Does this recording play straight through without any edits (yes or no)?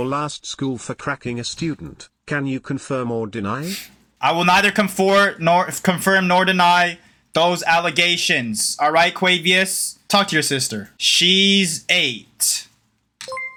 yes